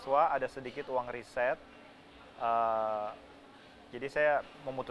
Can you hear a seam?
no; 0 cuts

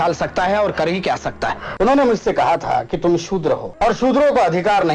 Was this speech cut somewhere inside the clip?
yes; 2 cuts; at 1.6 s, 3.7 s

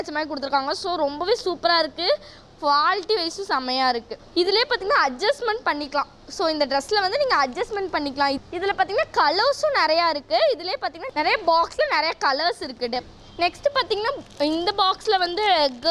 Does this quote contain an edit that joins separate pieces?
no; 0 cuts

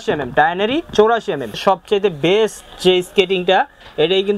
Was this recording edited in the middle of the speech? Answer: yes; 1 cut; at 1.6 s

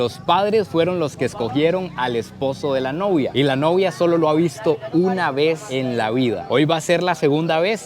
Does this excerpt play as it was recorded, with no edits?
yes; 0 cuts

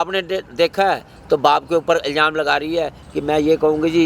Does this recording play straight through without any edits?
yes; 0 cuts

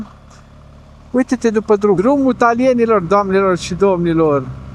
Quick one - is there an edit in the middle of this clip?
yes; 1 cut; at 2.0 s

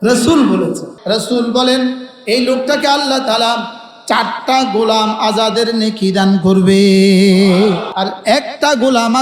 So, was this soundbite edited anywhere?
yes; 2 cuts; at 0.9 s, 7.9 s

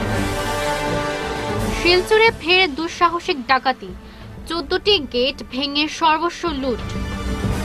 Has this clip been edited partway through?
yes; 1 cut; at 1.3 s

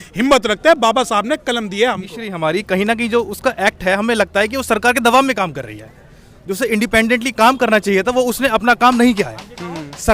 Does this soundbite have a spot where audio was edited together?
yes; 1 cut; at 2.3 s

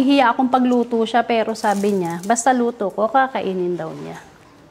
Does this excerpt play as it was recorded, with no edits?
yes; 0 cuts

